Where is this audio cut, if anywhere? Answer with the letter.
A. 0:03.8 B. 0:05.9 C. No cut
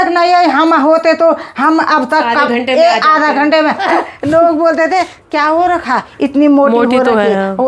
A